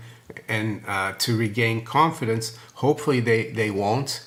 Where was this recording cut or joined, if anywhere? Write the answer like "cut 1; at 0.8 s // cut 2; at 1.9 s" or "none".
none